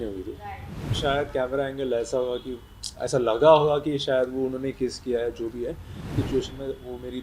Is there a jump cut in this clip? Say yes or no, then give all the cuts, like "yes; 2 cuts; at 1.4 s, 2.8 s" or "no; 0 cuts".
yes; 2 cuts; at 1.0 s, 6.1 s